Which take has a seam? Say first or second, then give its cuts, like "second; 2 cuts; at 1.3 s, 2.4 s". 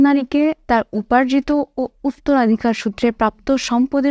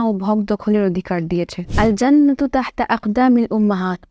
second; 1 cut; at 1.7 s